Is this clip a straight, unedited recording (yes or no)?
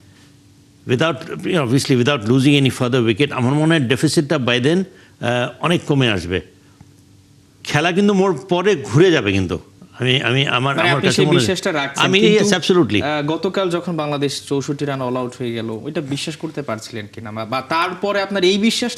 yes